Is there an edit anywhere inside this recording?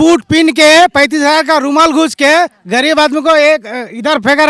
no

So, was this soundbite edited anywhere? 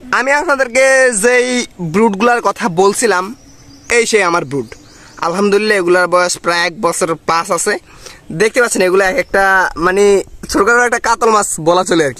no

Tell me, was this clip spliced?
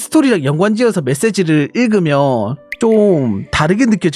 no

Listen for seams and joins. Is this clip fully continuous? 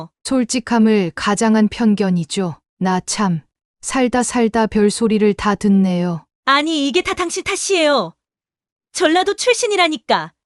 no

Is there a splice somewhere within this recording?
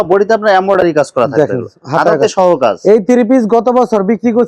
no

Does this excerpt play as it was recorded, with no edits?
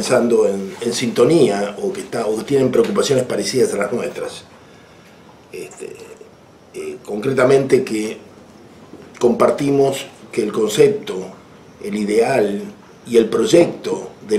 yes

